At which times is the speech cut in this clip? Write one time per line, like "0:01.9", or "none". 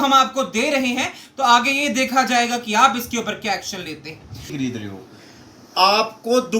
0:04.5